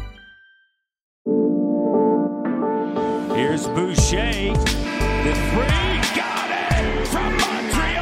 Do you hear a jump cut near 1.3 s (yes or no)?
yes